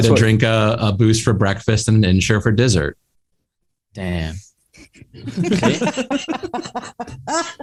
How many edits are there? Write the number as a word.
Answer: zero